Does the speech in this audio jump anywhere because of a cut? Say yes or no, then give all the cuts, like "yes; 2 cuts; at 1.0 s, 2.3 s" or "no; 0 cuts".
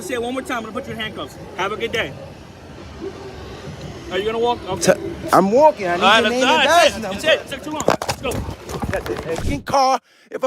yes; 1 cut; at 9.5 s